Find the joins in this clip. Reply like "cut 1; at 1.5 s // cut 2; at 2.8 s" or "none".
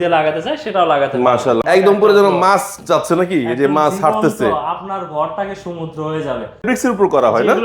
cut 1; at 1.6 s // cut 2; at 6.6 s